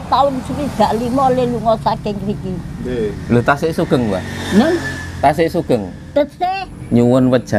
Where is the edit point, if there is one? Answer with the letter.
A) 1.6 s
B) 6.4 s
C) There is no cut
B